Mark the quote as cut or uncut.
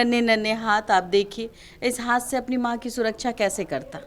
uncut